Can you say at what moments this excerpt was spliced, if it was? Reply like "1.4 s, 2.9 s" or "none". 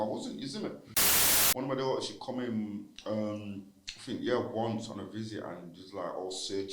1.1 s